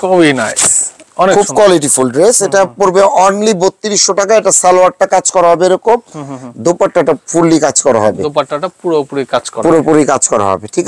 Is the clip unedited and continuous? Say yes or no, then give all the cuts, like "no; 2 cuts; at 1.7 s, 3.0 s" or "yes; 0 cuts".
yes; 0 cuts